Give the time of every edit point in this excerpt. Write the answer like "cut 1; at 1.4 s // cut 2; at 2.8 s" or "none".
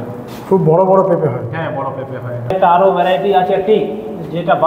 cut 1; at 2.6 s